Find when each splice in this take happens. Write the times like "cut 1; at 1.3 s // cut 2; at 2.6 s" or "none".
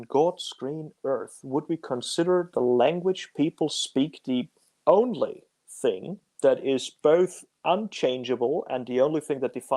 none